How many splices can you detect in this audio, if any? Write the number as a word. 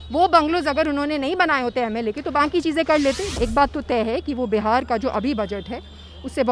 one